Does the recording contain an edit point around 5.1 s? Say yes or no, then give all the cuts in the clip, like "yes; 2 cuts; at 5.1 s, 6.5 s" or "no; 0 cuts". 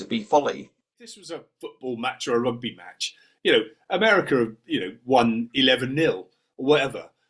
no; 1 cut; at 1.3 s